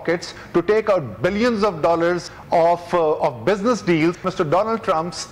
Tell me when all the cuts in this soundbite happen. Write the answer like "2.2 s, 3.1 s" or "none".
2.3 s, 4.3 s